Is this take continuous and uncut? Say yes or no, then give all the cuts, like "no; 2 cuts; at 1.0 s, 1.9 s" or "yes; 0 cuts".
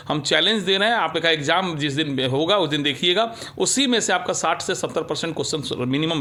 yes; 0 cuts